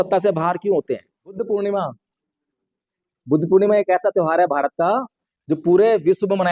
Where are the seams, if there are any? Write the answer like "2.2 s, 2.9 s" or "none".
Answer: 1.3 s